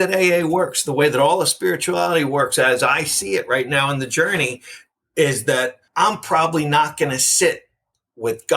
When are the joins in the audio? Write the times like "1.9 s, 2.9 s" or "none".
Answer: 5.8 s